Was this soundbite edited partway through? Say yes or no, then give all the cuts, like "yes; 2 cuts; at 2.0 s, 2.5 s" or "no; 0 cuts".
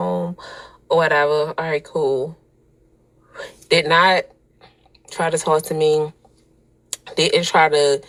no; 0 cuts